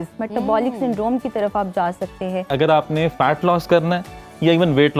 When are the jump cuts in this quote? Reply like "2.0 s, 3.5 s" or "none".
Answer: 2.5 s